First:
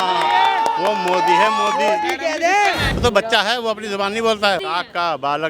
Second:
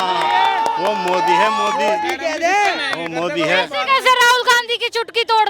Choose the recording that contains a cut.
first; 2 cuts; at 2.9 s, 4.6 s

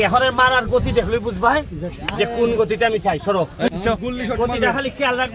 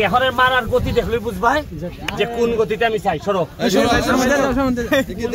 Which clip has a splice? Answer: first; 1 cut; at 3.7 s

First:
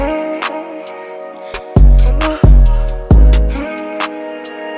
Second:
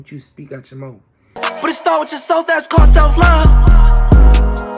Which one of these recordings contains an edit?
second; 1 cut; at 1.4 s

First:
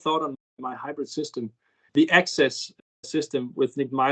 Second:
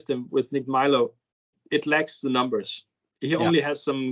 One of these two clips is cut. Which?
first; 1 cut; at 1.9 s

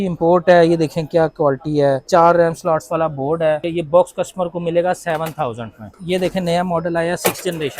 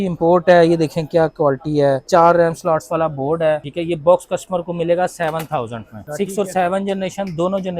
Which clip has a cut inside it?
first; 2 cuts; at 3.6 s, 5.9 s

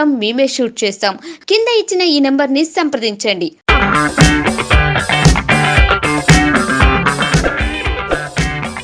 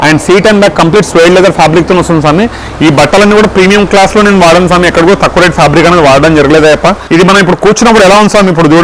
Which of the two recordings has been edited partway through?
second; 1 cut; at 7.0 s

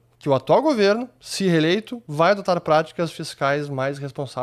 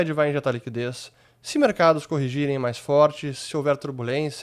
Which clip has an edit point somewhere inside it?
first; 1 cut; at 2.0 s

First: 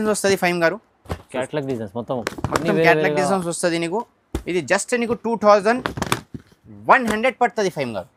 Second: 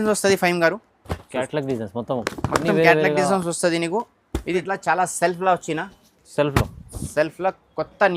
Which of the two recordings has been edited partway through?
second; 1 cut; at 4.6 s

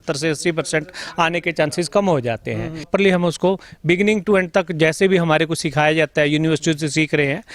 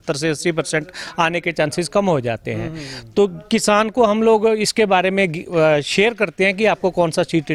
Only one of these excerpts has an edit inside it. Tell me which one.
first; 1 cut; at 2.9 s

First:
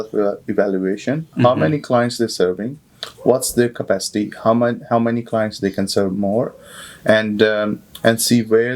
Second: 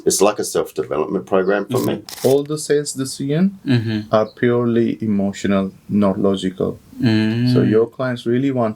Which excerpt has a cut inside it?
second; 1 cut; at 2.1 s

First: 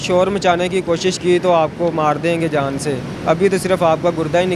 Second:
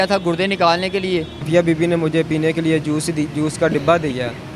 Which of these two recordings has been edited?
second; 1 cut; at 1.5 s

